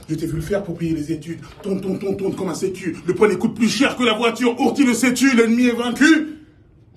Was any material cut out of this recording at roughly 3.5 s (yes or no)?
no